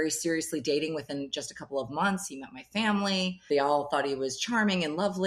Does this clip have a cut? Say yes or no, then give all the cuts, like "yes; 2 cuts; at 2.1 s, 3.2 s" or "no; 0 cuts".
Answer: no; 0 cuts